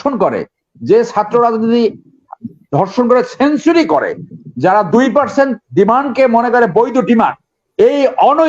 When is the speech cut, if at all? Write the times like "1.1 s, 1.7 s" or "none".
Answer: none